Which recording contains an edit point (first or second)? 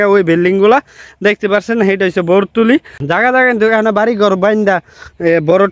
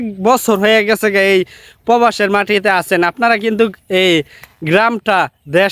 first